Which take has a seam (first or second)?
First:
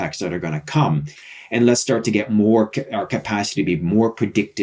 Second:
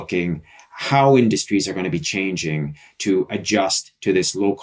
first